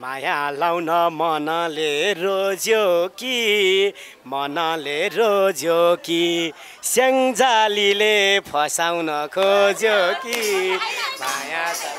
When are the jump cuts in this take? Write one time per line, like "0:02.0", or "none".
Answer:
none